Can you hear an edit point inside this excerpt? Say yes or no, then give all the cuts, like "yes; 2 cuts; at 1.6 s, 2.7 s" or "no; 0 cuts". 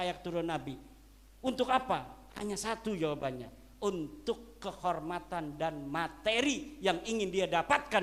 no; 0 cuts